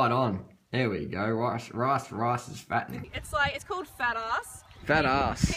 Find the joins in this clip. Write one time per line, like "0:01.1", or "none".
0:03.0